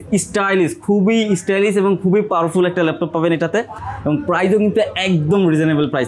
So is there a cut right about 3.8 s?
no; 0 cuts

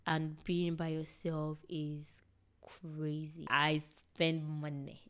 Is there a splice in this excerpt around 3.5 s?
yes; 1 cut; at 3.5 s

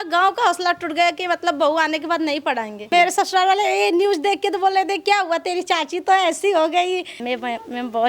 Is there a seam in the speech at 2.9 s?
yes; 2 cuts; at 2.9 s, 7.1 s

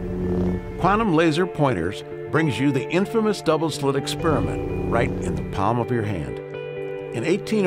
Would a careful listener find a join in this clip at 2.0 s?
no; 1 cut; at 5.7 s

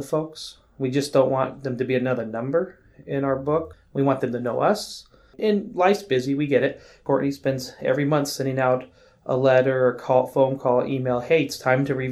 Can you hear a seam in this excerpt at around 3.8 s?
yes; 3 cuts; at 3.8 s, 5.4 s, 7.0 s

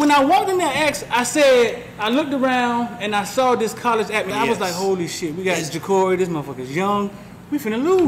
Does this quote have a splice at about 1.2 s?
no; 1 cut; at 4.3 s

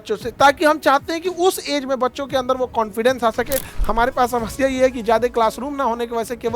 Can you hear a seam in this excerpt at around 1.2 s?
no; 1 cut; at 3.7 s

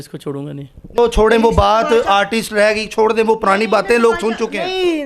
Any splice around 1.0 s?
yes; 1 cut; at 1.0 s

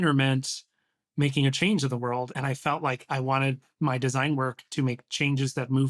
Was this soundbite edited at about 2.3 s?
yes; 1 cut; at 2.3 s

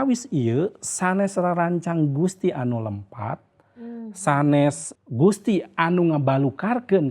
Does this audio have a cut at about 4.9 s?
yes; 1 cut; at 4.9 s

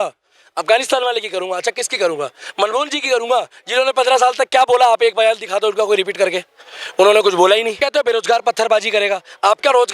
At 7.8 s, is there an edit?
yes; 1 cut; at 7.8 s

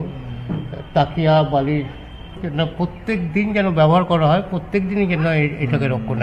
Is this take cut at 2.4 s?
yes; 1 cut; at 2.4 s

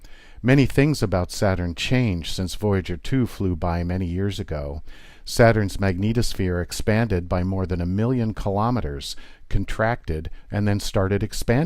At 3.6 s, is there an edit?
no; 1 cut; at 5.1 s

